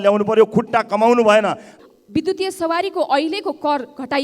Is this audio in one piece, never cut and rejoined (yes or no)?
no